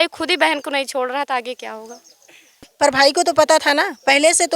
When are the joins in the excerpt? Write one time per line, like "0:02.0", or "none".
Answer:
0:02.6